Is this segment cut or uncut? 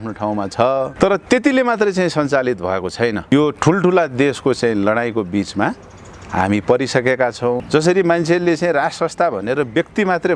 cut